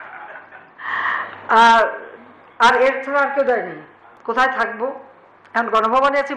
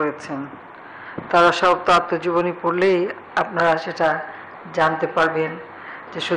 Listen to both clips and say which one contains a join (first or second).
first